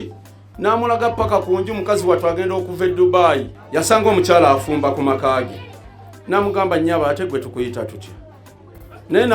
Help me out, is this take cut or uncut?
cut